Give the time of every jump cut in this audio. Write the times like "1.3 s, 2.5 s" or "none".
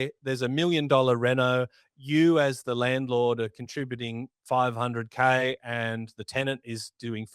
none